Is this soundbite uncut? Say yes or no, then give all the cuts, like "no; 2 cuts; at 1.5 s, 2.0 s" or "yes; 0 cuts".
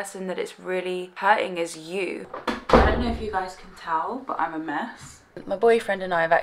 no; 3 cuts; at 1.1 s, 2.3 s, 5.4 s